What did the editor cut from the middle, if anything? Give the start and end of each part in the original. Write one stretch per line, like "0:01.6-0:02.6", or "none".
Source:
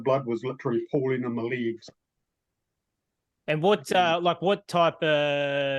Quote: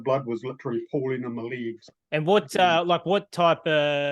0:01.9-0:03.3